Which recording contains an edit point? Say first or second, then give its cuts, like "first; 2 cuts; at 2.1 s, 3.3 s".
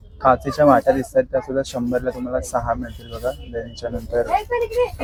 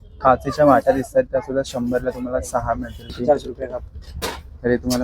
second; 1 cut; at 3.1 s